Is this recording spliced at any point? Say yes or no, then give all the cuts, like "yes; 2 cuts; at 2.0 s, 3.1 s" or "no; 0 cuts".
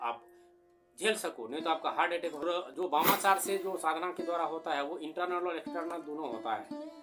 yes; 1 cut; at 2.6 s